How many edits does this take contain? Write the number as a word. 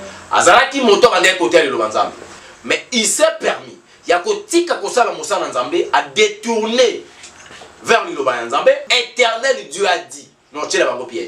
one